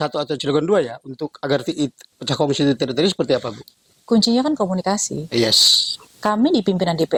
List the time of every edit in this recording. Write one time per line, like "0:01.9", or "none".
none